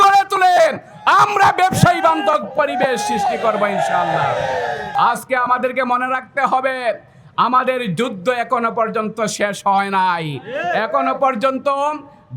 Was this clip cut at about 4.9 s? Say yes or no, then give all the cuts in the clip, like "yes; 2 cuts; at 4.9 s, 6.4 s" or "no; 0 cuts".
yes; 1 cut; at 4.9 s